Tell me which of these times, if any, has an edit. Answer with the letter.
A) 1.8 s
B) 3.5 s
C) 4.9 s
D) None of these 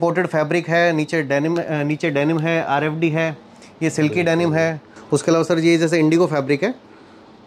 C